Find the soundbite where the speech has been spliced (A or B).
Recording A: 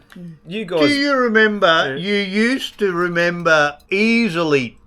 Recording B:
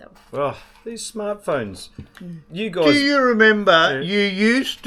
A